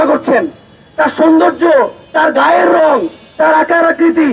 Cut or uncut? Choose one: uncut